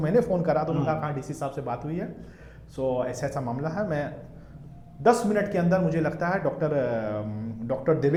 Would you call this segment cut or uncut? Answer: uncut